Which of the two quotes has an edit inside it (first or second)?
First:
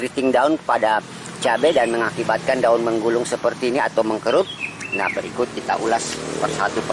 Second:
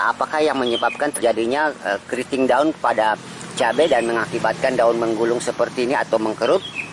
second